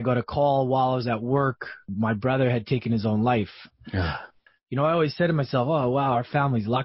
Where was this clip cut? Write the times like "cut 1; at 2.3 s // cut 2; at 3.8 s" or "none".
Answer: cut 1; at 1.9 s // cut 2; at 4.2 s

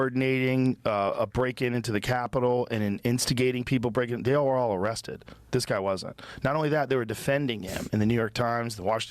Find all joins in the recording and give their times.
cut 1; at 6.9 s

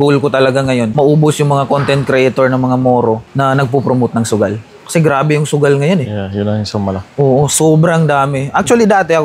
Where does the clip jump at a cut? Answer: cut 1; at 0.9 s

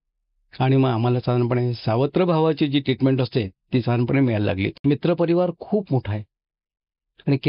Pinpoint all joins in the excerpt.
cut 1; at 4.8 s

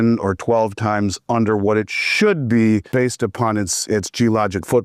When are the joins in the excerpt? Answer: none

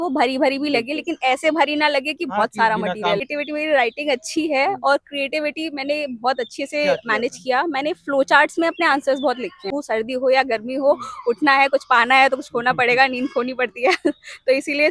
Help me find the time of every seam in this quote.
cut 1; at 3.3 s // cut 2; at 9.6 s

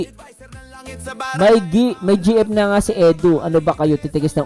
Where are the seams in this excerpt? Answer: none

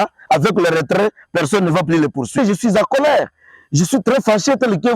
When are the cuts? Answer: cut 1; at 2.4 s

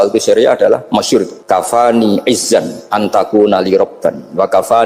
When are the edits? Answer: cut 1; at 1.3 s

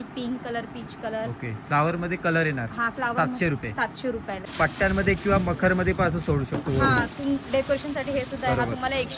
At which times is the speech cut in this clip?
cut 1; at 4.4 s

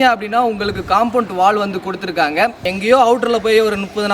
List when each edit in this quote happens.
cut 1; at 2.6 s

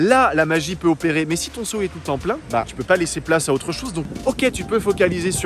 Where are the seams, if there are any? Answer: cut 1; at 4.1 s

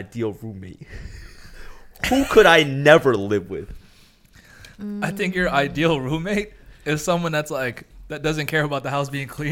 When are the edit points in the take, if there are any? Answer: none

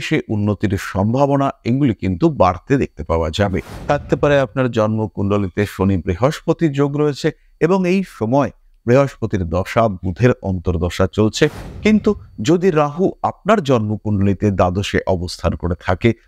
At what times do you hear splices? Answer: cut 1; at 3.7 s // cut 2; at 11.6 s

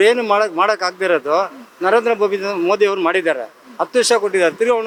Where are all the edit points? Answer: none

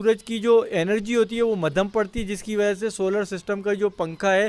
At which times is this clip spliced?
none

